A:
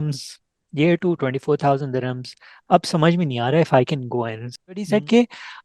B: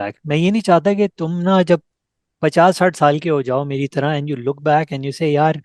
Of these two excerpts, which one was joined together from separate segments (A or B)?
A